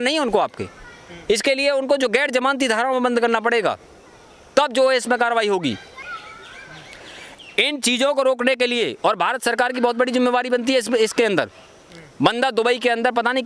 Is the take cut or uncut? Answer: cut